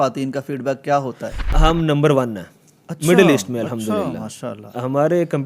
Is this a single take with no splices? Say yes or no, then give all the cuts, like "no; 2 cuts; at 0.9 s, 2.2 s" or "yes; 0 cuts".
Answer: no; 1 cut; at 1.4 s